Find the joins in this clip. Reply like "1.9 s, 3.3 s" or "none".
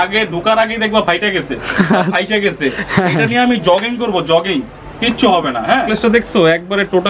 5.9 s